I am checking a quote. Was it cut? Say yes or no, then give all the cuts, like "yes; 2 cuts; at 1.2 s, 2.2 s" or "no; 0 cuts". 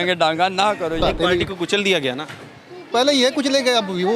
yes; 1 cut; at 1.0 s